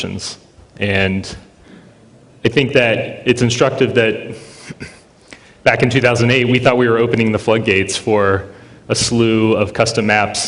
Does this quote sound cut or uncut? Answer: cut